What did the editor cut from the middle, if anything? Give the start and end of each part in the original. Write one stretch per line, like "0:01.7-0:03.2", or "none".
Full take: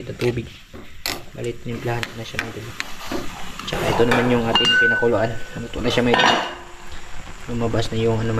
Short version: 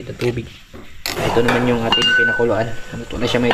0:01.2-0:03.8